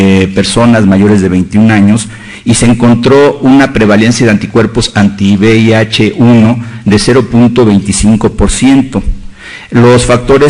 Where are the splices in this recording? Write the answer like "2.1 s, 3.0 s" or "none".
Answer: none